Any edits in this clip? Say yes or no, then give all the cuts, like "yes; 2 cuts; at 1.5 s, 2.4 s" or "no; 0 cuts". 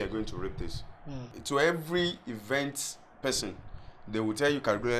yes; 1 cut; at 1.3 s